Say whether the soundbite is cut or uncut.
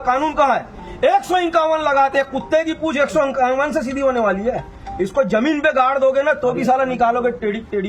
uncut